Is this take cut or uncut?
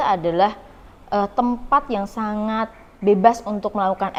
uncut